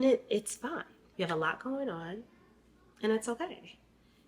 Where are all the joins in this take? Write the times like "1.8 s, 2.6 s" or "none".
1.0 s